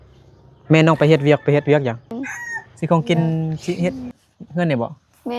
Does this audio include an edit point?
yes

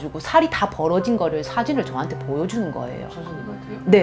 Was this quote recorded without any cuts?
yes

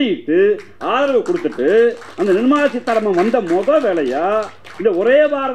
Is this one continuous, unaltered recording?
yes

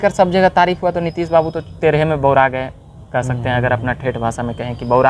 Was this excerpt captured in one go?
yes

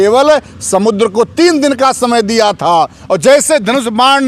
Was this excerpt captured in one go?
yes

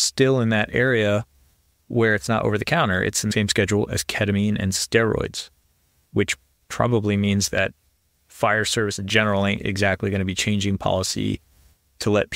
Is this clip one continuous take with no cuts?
no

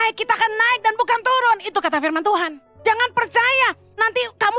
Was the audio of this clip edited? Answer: yes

